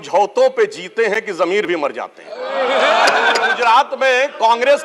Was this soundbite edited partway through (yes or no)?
yes